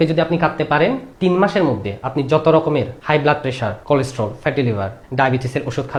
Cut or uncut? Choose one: uncut